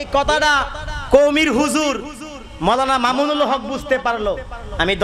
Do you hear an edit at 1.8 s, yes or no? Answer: no